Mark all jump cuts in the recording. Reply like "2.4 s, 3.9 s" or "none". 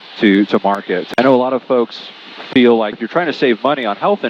1.0 s